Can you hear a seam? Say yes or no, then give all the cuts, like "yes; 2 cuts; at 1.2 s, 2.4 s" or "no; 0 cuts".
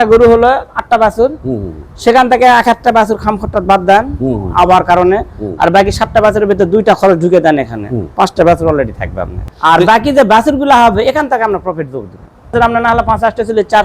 yes; 2 cuts; at 9.4 s, 12.5 s